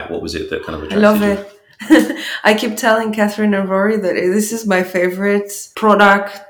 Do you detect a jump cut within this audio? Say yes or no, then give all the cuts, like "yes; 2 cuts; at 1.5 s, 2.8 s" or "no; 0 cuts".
yes; 1 cut; at 5.6 s